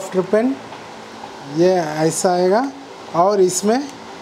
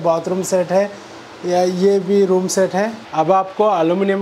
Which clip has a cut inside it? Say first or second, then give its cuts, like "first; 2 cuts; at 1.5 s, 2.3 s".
second; 1 cut; at 3.0 s